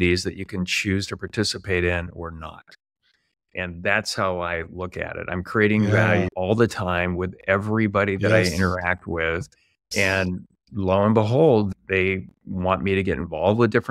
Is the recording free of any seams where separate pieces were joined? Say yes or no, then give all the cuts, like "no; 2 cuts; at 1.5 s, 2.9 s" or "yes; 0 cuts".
no; 2 cuts; at 6.3 s, 9.9 s